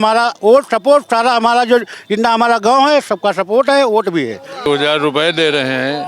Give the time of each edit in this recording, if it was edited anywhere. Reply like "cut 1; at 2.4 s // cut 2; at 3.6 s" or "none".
cut 1; at 4.7 s